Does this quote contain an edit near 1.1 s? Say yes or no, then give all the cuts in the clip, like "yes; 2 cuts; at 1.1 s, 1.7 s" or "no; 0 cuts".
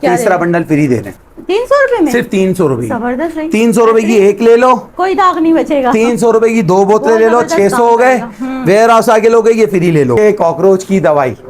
yes; 2 cuts; at 1.1 s, 10.2 s